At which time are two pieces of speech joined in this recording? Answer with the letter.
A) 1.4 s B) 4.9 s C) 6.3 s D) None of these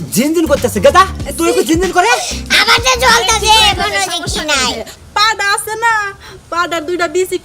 B